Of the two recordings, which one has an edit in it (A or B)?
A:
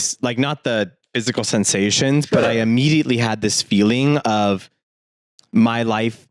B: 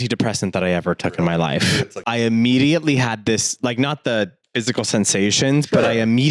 B